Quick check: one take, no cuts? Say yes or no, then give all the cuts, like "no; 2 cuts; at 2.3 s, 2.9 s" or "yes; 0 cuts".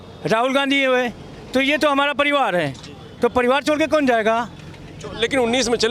yes; 0 cuts